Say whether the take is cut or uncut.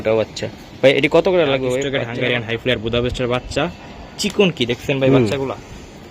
cut